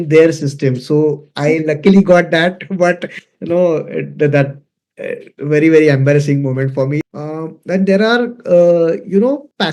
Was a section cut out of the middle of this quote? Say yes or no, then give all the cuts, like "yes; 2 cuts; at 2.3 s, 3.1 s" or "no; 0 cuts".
yes; 1 cut; at 7.0 s